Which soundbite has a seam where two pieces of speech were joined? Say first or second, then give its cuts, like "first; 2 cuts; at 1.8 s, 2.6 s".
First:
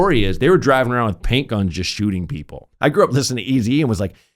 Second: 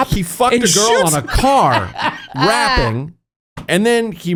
first; 1 cut; at 2.6 s